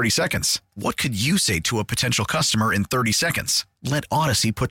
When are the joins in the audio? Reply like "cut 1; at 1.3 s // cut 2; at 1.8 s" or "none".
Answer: none